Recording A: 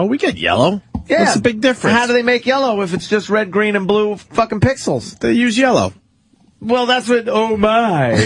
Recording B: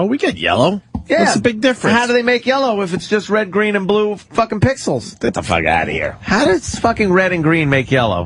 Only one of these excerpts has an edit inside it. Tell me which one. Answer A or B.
A